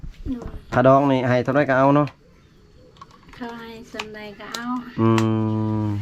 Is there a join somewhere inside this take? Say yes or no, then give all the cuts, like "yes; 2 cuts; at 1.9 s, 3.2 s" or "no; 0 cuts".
no; 0 cuts